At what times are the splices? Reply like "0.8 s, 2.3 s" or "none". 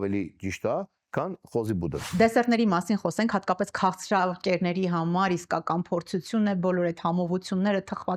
2.1 s